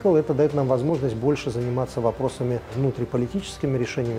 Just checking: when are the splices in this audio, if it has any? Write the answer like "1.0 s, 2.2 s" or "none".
2.7 s